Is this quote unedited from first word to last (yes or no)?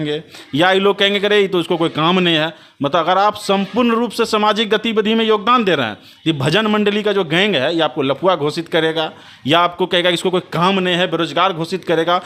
yes